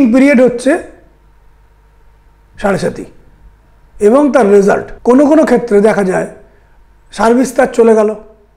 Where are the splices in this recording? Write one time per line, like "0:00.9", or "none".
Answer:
0:04.9